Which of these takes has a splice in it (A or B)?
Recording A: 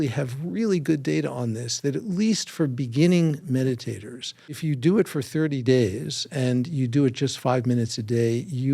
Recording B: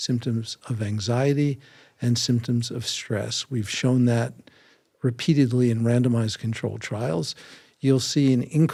A